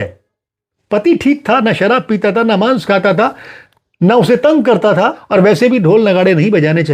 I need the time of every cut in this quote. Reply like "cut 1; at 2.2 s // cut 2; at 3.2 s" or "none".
cut 1; at 5.2 s